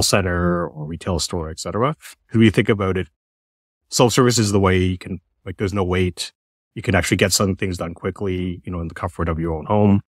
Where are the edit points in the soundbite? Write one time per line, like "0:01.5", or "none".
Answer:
none